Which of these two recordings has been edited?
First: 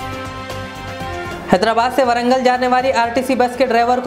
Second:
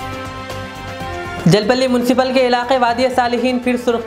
first; 1 cut; at 1.3 s

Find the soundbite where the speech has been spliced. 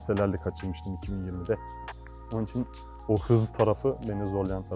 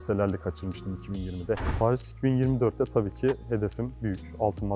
second; 1 cut; at 1.7 s

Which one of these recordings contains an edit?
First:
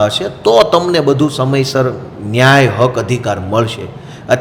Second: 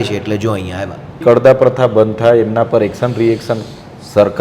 second; 1 cut; at 1.2 s

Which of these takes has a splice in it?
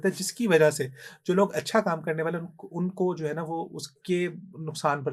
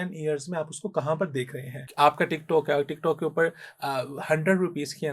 second; 1 cut; at 1.8 s

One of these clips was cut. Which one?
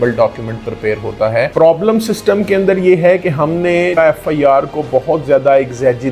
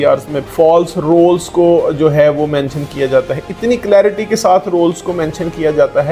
first; 2 cuts; at 1.5 s, 3.9 s

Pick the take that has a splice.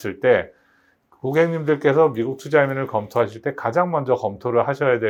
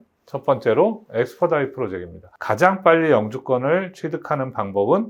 second; 1 cut; at 2.3 s

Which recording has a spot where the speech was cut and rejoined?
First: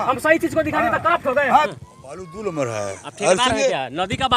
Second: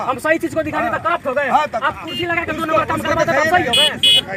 first; 1 cut; at 1.7 s

